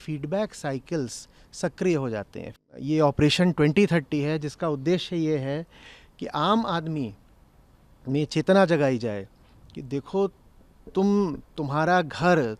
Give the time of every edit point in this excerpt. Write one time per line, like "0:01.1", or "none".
0:02.5